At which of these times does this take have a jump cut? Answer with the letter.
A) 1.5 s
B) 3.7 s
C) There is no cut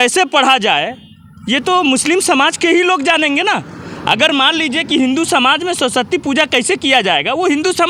C